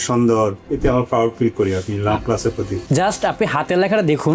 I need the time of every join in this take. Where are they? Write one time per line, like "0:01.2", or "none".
0:02.8